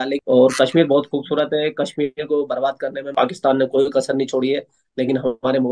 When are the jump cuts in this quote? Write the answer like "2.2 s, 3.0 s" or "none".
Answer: 3.1 s